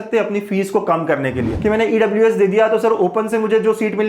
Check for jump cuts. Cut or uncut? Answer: cut